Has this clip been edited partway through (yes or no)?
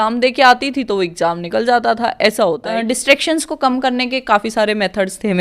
yes